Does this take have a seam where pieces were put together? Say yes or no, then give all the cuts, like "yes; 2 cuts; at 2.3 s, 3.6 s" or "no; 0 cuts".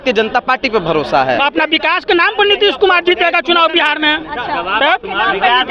yes; 1 cut; at 1.4 s